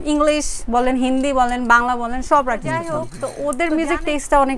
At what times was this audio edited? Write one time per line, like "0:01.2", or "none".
0:03.0